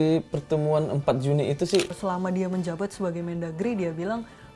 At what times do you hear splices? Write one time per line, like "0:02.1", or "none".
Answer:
0:01.9